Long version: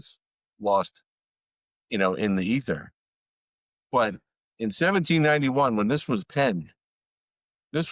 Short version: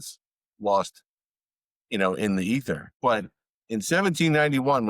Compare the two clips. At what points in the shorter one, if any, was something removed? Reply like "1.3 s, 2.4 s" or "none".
2.9 s